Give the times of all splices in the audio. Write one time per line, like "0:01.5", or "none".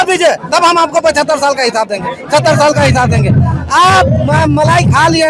none